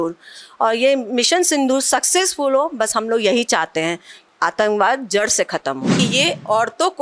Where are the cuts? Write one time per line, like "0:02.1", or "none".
0:05.9